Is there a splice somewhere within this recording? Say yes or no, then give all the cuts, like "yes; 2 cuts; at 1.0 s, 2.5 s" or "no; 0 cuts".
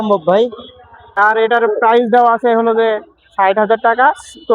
yes; 1 cut; at 1.2 s